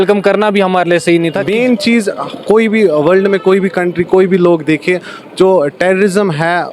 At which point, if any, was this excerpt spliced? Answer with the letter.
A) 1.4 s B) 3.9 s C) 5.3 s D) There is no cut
A